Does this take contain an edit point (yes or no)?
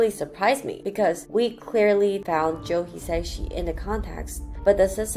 no